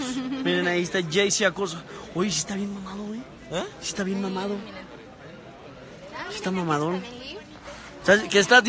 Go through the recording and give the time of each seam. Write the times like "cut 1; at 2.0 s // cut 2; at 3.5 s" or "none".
none